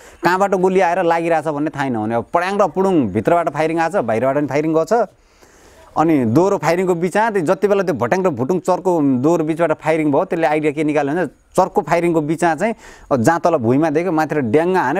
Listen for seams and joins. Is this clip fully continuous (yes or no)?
yes